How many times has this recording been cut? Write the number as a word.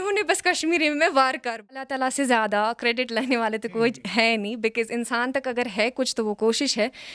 one